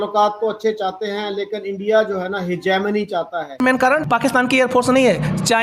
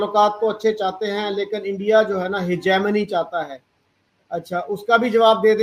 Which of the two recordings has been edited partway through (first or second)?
first